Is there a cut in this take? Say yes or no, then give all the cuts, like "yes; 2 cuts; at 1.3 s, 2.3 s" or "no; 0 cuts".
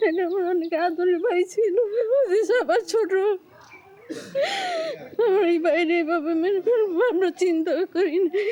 no; 0 cuts